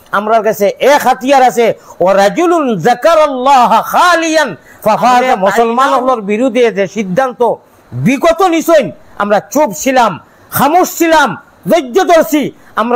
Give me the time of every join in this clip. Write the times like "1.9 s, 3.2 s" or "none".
5.3 s